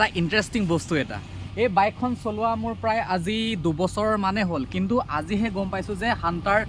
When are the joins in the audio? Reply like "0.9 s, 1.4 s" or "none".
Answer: none

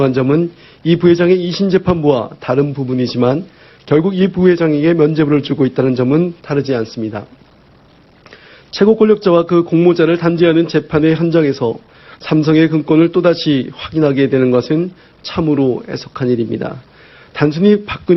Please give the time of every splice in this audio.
11.6 s

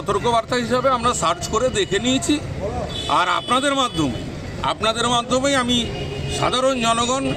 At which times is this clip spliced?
none

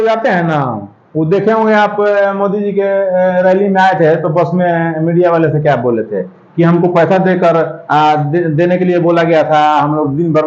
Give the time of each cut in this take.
none

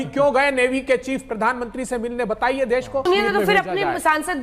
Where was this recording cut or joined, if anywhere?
3.0 s

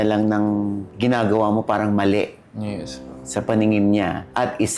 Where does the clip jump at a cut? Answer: none

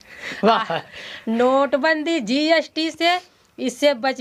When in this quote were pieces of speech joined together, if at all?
none

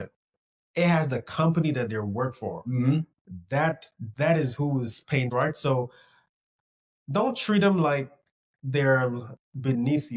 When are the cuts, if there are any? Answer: 5.3 s

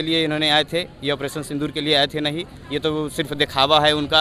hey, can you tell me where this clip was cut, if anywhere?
none

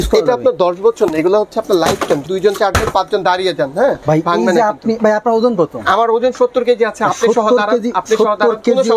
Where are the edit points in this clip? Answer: 2.2 s, 4.0 s

